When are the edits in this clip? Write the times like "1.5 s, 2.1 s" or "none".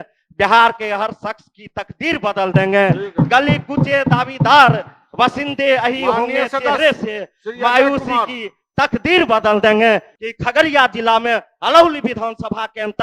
10.1 s